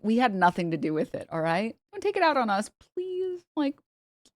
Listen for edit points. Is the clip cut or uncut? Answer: cut